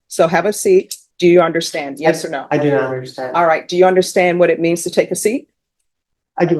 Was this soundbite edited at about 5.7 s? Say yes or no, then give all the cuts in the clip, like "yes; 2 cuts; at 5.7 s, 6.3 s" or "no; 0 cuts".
no; 1 cut; at 1.0 s